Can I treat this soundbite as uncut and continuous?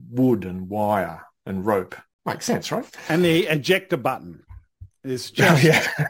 no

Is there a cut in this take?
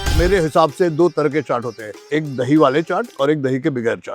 no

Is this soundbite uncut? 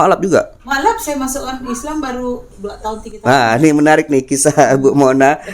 yes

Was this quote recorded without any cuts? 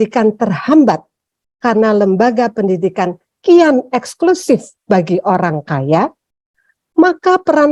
yes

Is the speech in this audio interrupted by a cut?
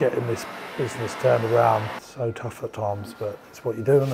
yes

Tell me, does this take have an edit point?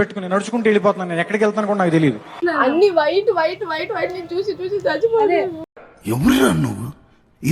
yes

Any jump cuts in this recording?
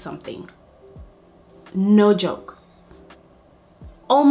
no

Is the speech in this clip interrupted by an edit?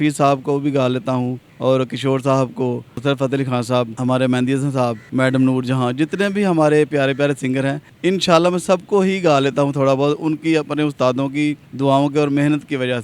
yes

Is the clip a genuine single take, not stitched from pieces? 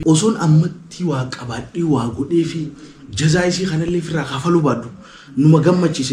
yes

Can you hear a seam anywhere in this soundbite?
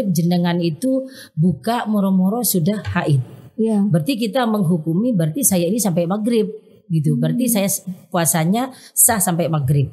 no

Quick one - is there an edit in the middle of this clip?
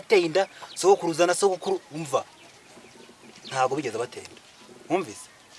no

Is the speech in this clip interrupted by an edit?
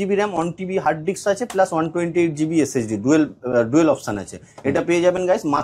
no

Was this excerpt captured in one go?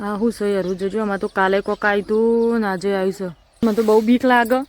no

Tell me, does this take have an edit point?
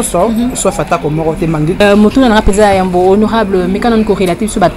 yes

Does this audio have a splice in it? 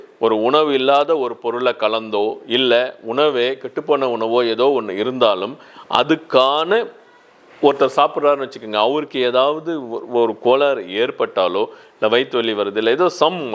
no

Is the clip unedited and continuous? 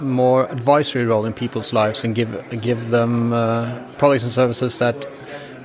yes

